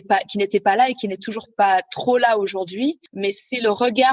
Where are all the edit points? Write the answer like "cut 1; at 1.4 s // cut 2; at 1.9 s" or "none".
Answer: cut 1; at 3.1 s